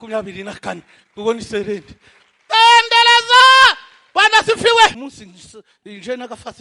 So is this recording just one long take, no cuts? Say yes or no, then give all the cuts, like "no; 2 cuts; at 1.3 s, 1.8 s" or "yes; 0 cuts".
no; 1 cut; at 5.1 s